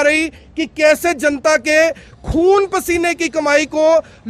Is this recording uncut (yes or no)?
yes